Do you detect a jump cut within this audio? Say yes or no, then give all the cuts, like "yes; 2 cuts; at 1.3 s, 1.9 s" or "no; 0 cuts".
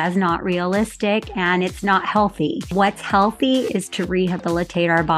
yes; 1 cut; at 2.7 s